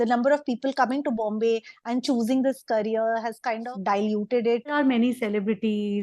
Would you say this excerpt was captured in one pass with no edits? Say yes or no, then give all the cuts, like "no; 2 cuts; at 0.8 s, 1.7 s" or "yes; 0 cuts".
no; 2 cuts; at 3.7 s, 4.7 s